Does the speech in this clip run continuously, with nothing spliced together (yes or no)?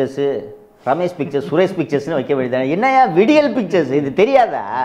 yes